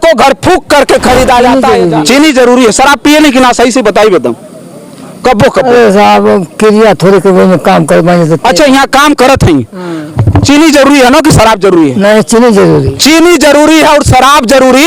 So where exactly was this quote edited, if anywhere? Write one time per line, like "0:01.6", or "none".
0:01.6